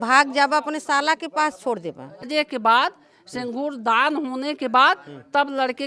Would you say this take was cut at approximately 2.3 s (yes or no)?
yes